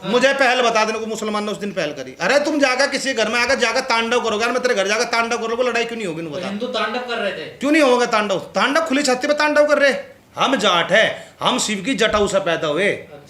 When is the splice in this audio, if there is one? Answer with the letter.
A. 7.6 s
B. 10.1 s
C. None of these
B